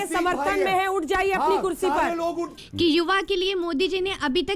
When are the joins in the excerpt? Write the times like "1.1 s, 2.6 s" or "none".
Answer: 2.5 s